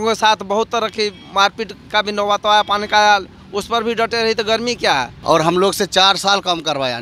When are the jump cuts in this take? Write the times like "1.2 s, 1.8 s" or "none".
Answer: 5.1 s